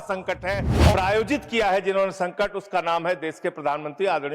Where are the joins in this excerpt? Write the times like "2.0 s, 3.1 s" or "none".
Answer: 0.9 s

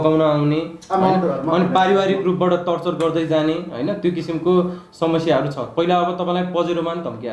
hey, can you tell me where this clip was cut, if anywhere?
none

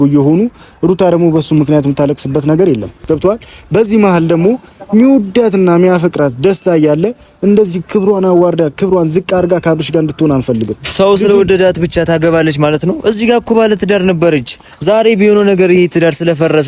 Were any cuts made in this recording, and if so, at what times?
2.9 s

